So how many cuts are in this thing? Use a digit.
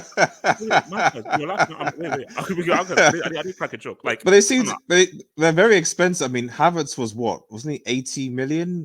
0